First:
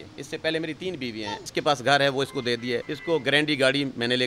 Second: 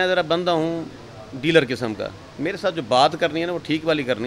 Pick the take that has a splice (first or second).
first